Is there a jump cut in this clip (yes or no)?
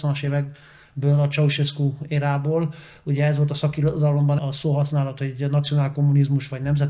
yes